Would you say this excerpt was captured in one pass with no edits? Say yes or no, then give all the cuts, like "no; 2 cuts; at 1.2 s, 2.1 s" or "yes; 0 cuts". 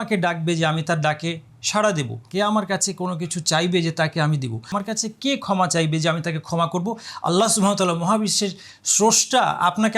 no; 2 cuts; at 2.2 s, 4.7 s